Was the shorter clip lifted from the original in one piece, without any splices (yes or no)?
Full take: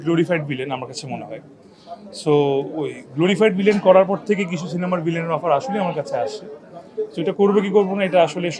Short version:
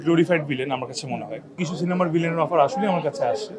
no